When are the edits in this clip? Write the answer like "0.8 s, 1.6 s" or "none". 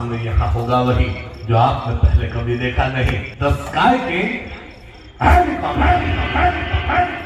3.3 s